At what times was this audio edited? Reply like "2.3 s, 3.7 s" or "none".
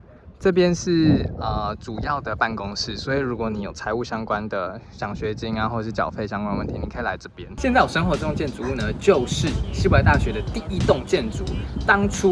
7.4 s